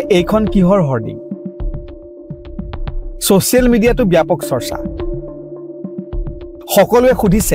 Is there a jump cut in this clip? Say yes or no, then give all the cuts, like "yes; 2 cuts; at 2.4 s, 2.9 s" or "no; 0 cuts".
yes; 2 cuts; at 4.6 s, 6.6 s